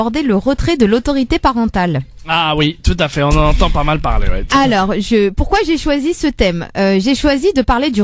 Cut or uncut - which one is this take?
cut